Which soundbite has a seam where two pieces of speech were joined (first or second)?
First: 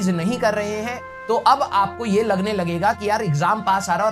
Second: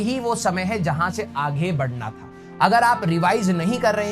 second